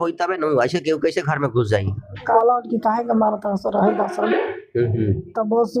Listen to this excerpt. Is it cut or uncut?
cut